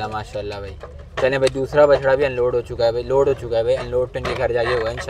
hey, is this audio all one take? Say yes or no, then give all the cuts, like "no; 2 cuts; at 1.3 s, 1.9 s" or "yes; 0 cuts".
yes; 0 cuts